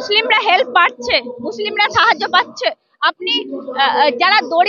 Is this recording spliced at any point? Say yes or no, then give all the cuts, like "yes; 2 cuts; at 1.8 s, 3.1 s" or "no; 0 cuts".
no; 0 cuts